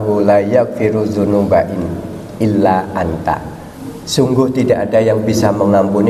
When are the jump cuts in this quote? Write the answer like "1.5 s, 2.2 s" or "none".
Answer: none